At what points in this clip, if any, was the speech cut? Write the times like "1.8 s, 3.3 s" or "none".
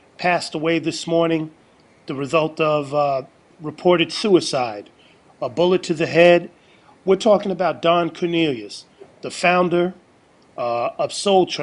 5.0 s